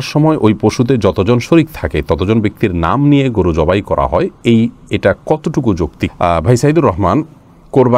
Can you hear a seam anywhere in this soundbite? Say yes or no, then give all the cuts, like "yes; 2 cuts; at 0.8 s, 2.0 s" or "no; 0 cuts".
no; 0 cuts